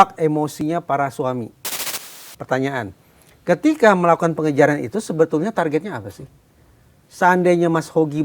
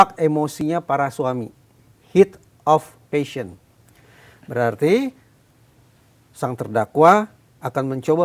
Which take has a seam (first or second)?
first